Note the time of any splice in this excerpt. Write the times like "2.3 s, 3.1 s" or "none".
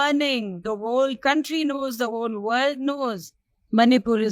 none